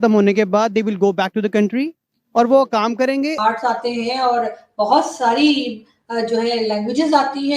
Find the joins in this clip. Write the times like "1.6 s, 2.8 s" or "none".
3.4 s